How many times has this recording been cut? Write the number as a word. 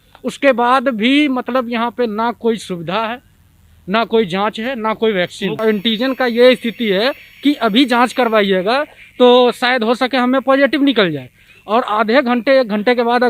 one